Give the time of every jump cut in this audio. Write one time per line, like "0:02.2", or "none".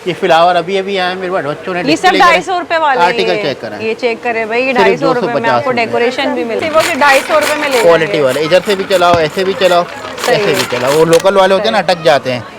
0:06.6